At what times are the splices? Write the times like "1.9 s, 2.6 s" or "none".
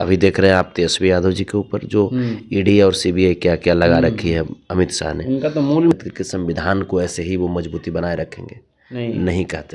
5.9 s

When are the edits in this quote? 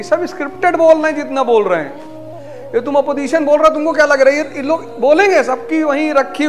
none

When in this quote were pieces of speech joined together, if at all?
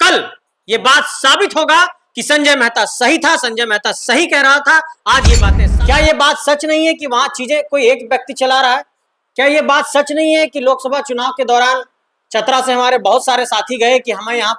5.6 s

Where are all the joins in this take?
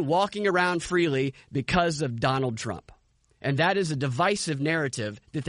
none

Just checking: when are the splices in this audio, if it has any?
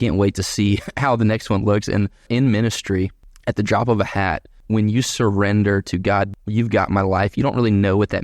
2.3 s, 3.3 s, 4.6 s, 6.3 s

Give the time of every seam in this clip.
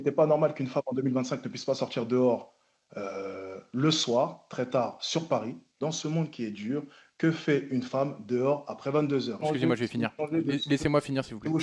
5.8 s, 9.4 s

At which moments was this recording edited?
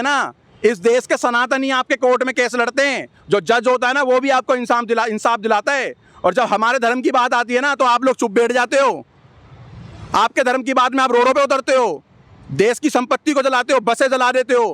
none

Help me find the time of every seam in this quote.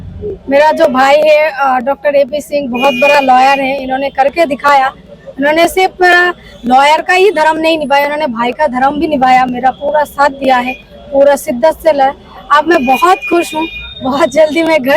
none

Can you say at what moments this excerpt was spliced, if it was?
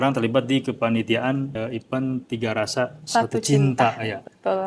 1.5 s

